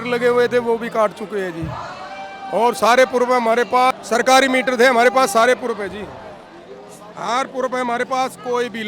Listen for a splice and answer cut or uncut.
cut